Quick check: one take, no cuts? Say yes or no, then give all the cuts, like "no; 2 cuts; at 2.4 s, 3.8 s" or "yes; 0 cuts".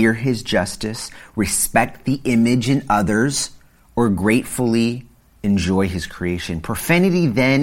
yes; 0 cuts